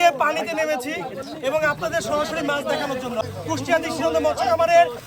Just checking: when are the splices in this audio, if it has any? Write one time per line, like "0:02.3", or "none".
0:03.2